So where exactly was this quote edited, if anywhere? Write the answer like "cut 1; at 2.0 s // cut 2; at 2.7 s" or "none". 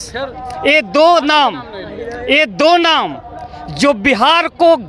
none